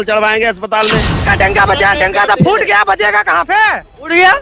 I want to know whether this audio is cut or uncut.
cut